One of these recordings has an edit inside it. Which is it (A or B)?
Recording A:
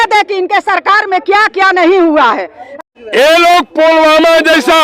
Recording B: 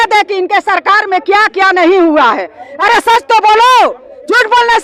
A